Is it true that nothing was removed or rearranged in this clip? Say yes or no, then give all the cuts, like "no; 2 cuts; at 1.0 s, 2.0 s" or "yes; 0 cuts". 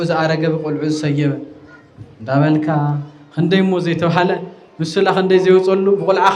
yes; 0 cuts